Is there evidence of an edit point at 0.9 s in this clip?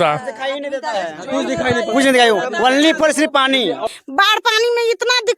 no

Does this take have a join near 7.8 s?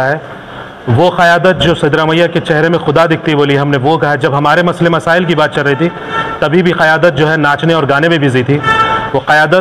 no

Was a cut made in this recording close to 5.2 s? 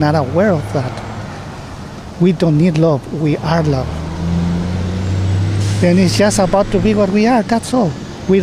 no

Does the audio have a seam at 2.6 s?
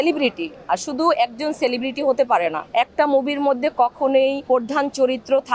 yes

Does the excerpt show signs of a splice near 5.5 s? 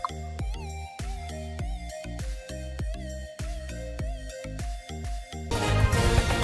yes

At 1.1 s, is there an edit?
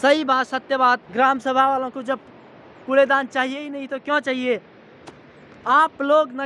yes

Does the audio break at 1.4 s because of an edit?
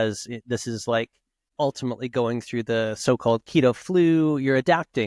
yes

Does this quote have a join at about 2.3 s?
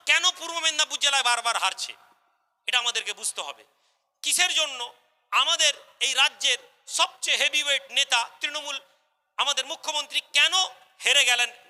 no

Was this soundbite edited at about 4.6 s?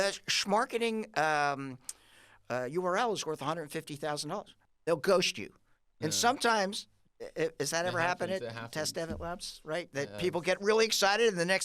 yes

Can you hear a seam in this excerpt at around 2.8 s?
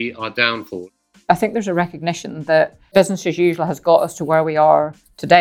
yes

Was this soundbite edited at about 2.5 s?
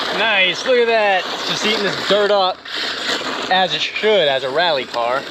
no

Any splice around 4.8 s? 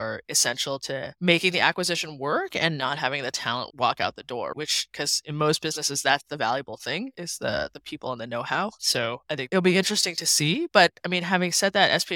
no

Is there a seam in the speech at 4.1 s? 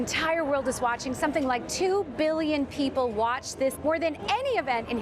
yes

